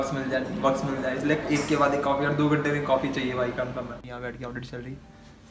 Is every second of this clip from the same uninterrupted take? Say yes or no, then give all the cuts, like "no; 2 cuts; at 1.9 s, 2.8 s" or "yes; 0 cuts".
no; 1 cut; at 4.0 s